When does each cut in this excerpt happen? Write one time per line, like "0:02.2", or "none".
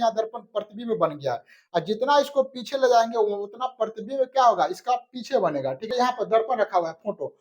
0:05.9